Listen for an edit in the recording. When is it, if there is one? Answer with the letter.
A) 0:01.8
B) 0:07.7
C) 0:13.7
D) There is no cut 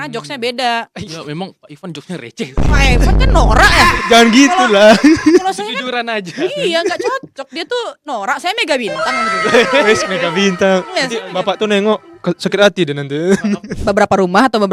C